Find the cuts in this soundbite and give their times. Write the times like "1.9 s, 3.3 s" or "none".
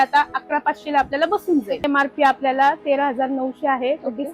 1.9 s